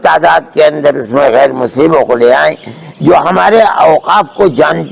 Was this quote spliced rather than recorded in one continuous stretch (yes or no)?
no